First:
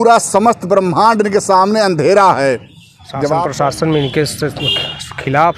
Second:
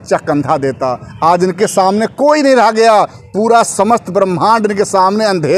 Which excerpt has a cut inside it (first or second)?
first